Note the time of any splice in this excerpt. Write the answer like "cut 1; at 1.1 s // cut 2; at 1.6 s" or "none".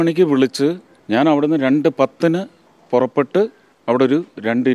cut 1; at 0.9 s // cut 2; at 3.7 s